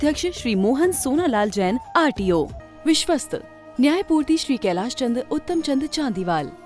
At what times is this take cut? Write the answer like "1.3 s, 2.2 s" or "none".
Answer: 2.6 s